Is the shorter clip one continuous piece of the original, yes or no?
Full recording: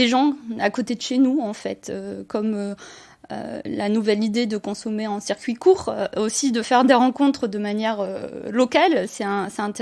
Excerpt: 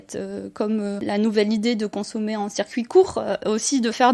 no